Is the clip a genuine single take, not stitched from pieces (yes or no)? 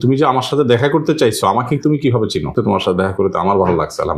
no